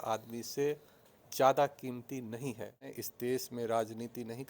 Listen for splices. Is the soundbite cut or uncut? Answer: cut